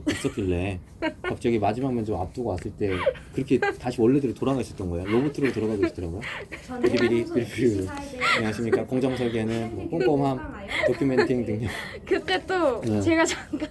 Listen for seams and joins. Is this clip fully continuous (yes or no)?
yes